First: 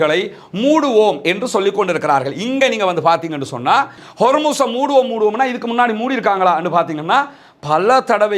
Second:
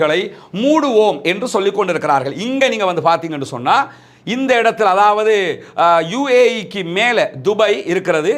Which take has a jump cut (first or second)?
first